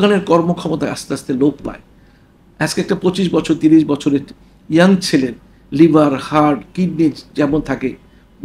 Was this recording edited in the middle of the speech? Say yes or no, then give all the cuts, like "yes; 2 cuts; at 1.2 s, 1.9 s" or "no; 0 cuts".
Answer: no; 0 cuts